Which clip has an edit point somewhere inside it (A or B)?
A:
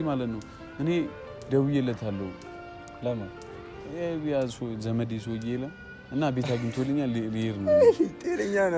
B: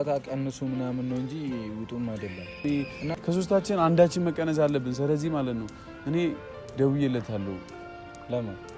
B